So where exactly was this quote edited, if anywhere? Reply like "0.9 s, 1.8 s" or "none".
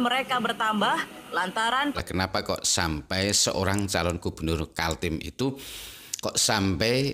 2.0 s

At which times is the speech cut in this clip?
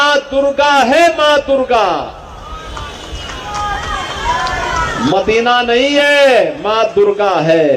none

